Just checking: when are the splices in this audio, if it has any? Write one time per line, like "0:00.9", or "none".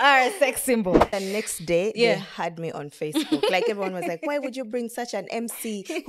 0:01.1